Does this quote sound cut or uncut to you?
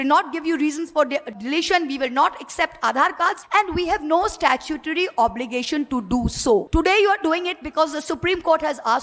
cut